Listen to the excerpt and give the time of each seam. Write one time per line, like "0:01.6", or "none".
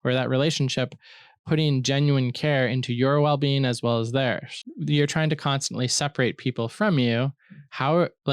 0:04.7